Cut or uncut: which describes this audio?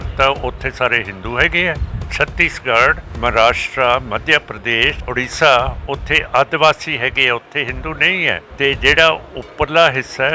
cut